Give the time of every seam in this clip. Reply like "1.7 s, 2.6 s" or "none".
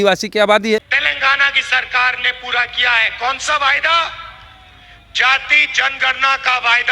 1.0 s